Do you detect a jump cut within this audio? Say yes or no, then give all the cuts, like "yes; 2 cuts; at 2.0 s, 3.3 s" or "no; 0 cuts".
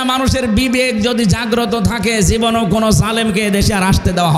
no; 0 cuts